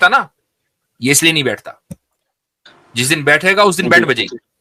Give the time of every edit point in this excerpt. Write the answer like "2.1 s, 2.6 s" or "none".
none